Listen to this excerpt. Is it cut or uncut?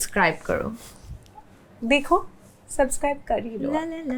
uncut